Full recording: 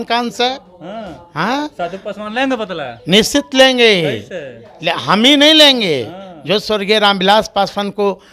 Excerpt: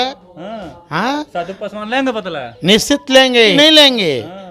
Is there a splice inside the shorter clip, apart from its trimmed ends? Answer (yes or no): yes